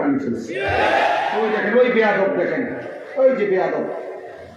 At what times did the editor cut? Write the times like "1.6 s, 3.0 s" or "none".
1.3 s